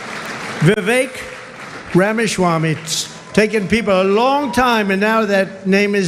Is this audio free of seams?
yes; 0 cuts

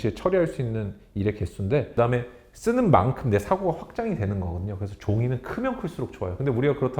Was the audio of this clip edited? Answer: yes; 1 cut; at 1.9 s

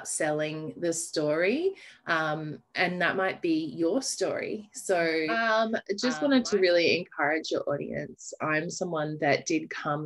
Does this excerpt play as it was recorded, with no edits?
no; 1 cut; at 5.4 s

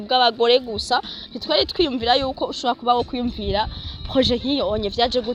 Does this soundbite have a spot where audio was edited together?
no; 0 cuts

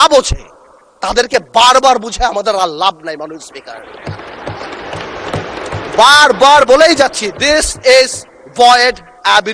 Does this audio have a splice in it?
no; 0 cuts

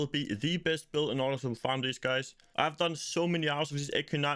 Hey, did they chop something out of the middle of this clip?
no; 0 cuts

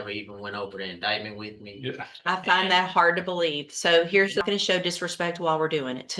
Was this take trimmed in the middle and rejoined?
yes; 1 cut; at 4.4 s

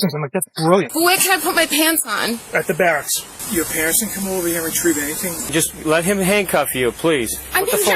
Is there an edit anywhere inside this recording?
yes; 3 cuts; at 0.9 s, 3.4 s, 5.5 s

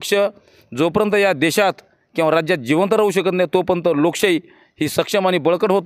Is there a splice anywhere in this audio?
no; 0 cuts

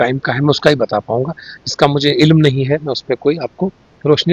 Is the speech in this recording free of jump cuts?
yes; 0 cuts

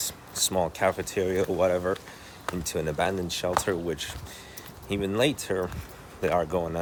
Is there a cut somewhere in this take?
no; 0 cuts

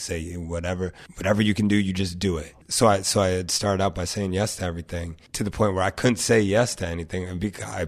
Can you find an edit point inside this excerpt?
yes; 3 cuts; at 1.1 s, 2.5 s, 5.2 s

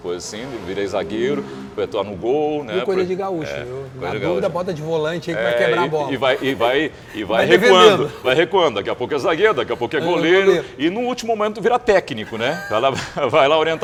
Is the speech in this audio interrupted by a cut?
no; 0 cuts

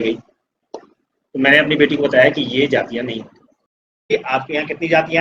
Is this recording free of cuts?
no; 1 cut; at 4.1 s

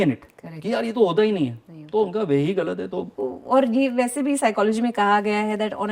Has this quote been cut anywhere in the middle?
yes; 1 cut; at 3.1 s

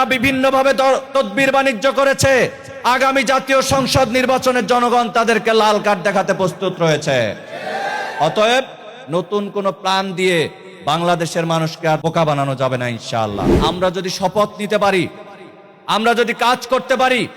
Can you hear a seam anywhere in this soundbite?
yes; 2 cuts; at 12.0 s, 13.5 s

